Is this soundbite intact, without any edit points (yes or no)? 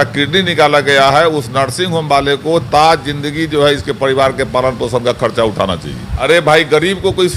no